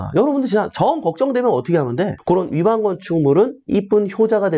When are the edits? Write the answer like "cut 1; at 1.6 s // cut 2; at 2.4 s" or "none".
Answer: cut 1; at 2.2 s